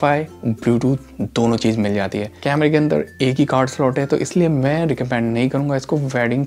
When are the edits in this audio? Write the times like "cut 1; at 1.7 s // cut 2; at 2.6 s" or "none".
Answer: cut 1; at 2.3 s